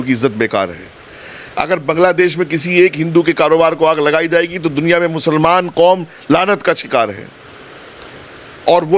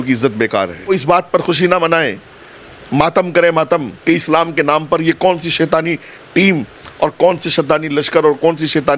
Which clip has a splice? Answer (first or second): second